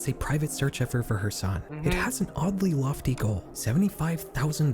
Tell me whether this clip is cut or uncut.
cut